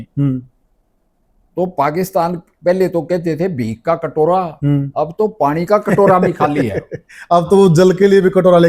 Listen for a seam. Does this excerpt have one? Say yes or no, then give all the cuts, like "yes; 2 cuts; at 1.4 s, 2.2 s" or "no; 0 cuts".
no; 0 cuts